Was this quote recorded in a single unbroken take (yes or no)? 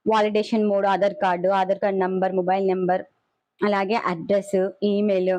yes